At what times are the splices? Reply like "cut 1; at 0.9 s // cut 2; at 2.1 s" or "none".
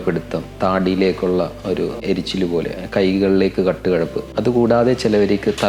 cut 1; at 2.0 s // cut 2; at 4.2 s